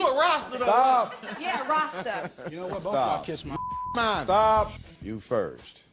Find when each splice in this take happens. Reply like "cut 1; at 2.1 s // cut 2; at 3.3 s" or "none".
cut 1; at 4.9 s